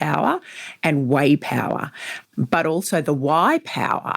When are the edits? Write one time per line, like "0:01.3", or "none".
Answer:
0:02.1